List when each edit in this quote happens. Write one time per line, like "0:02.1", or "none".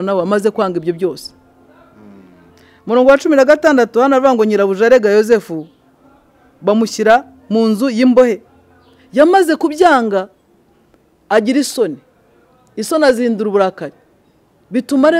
none

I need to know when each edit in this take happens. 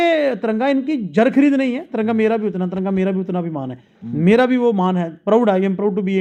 none

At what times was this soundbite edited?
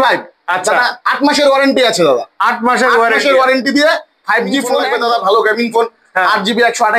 0:04.8

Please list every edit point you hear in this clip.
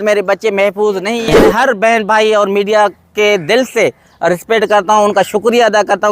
0:01.2

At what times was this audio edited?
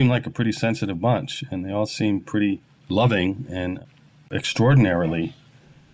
0:02.7
0:04.4

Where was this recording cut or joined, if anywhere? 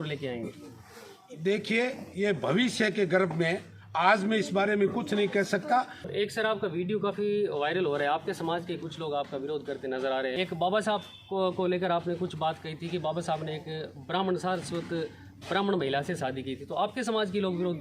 0:06.0
0:10.3

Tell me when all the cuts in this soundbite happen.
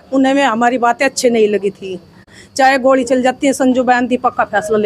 0:02.3

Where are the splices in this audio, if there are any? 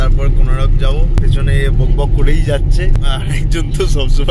0:01.2
0:03.0

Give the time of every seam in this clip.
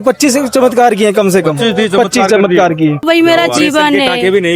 0:03.0

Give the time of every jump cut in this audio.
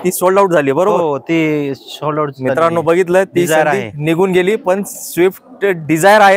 none

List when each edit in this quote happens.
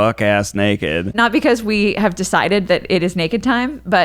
0:01.1

